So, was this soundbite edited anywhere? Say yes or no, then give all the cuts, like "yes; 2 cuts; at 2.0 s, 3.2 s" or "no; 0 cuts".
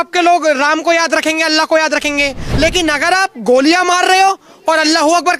yes; 1 cut; at 2.4 s